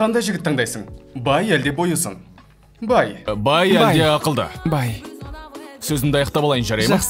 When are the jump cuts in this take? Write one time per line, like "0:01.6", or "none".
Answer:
0:03.3